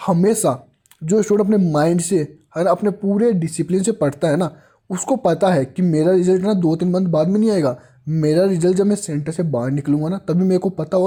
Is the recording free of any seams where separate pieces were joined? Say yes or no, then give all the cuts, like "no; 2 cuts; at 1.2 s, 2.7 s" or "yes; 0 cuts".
yes; 0 cuts